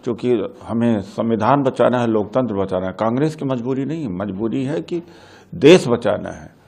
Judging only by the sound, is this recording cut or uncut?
uncut